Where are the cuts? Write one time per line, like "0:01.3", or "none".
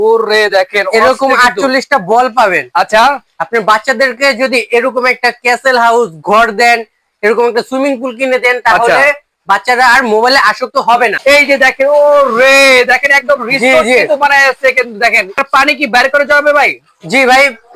0:11.2
0:15.3